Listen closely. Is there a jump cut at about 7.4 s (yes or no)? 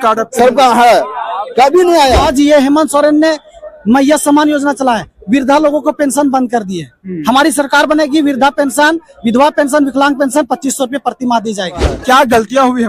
no